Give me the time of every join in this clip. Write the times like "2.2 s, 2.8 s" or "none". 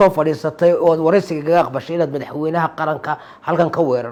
none